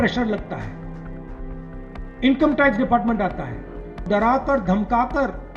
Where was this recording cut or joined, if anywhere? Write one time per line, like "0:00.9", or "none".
0:04.1

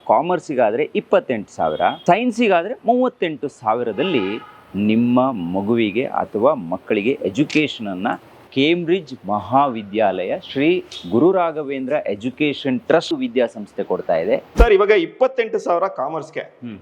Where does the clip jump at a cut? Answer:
0:02.0
0:08.3
0:13.1
0:14.5

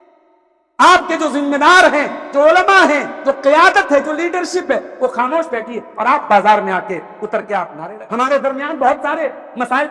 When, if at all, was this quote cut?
0:07.9

